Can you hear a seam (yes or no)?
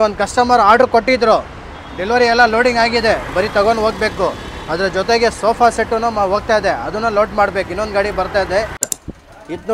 yes